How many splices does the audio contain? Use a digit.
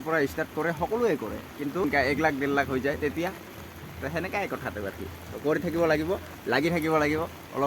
1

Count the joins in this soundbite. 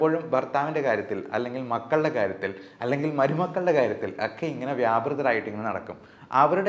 0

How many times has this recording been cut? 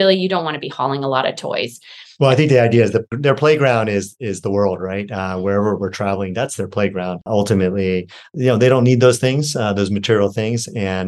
2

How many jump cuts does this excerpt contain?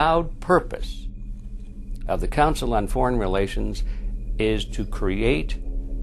0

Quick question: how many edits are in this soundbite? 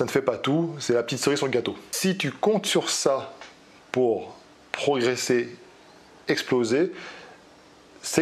1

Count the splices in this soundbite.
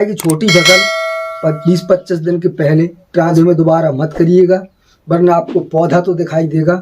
1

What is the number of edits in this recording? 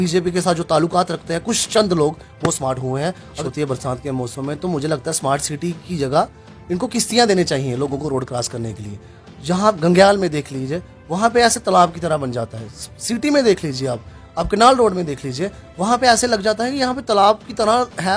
1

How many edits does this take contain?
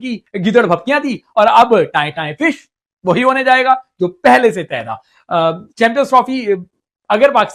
0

